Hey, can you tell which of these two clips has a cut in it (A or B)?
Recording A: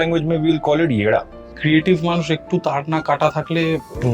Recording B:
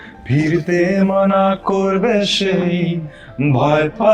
A